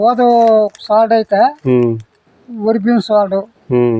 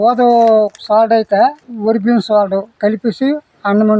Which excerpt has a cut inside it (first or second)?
second